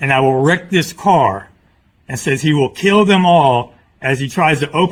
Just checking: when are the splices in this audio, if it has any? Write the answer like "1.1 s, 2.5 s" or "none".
none